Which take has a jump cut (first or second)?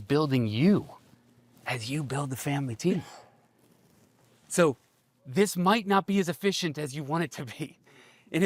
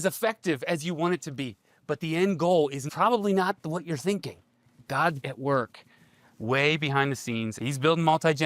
second